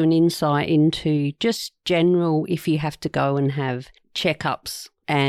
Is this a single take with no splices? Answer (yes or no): yes